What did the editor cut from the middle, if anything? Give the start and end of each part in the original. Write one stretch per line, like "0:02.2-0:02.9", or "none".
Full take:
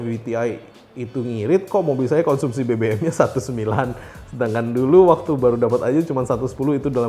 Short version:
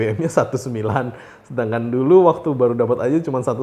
none